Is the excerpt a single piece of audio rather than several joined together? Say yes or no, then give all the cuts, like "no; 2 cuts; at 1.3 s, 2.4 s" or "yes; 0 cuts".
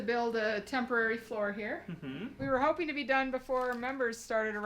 no; 1 cut; at 2.4 s